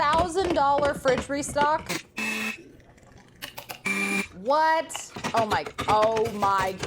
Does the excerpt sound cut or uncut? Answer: cut